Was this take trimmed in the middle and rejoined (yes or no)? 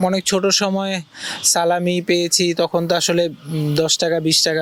no